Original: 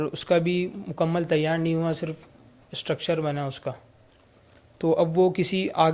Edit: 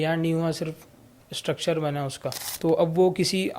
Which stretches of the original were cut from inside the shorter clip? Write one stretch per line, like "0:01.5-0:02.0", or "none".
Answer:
0:03.9-0:04.7